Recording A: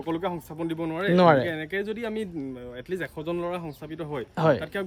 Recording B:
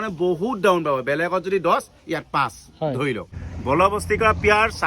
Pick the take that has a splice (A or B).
B